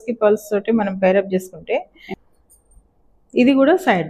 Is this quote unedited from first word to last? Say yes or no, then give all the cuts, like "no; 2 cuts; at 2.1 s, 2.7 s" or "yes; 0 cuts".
no; 1 cut; at 2.0 s